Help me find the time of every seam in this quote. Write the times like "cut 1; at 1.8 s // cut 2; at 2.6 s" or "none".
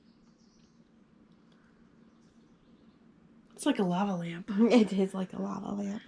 none